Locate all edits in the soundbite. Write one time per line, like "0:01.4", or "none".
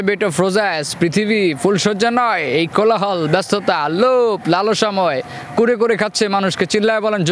none